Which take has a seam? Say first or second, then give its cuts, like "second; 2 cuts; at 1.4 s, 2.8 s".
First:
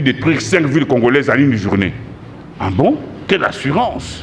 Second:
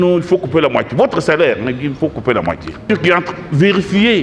second; 1 cut; at 2.8 s